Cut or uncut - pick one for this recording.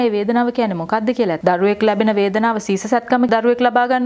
cut